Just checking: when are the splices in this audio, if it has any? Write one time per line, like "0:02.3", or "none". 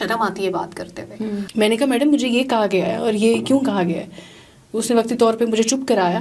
0:01.5